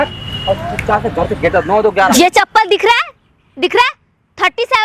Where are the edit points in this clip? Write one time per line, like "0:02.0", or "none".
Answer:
0:02.1